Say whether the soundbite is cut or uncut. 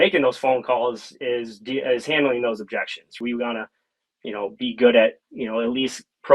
cut